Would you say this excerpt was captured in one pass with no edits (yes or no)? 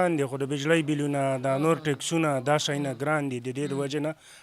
yes